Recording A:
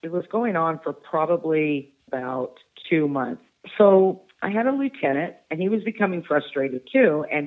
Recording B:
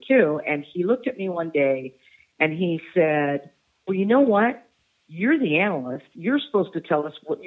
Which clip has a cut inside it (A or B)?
A